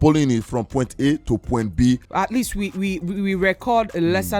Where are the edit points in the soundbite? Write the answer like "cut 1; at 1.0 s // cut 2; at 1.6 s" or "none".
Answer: cut 1; at 2.1 s